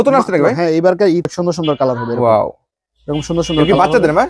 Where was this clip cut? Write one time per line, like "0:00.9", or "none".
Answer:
0:01.3